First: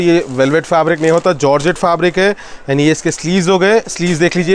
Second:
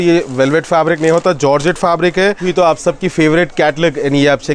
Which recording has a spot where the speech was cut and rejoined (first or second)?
second